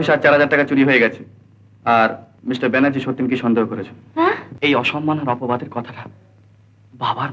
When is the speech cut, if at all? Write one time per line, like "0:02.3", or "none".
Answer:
0:02.3
0:04.5